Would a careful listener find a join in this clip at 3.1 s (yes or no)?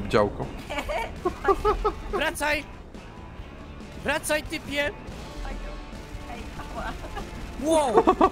no